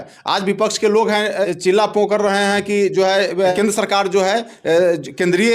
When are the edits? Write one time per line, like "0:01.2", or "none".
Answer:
0:01.4
0:03.5